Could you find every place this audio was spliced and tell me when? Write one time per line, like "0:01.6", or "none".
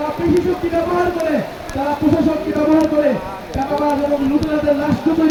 none